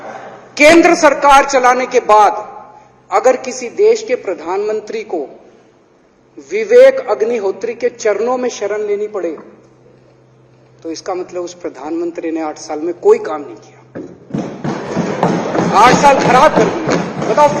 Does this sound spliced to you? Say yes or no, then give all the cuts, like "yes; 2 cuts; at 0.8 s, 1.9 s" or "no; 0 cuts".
no; 0 cuts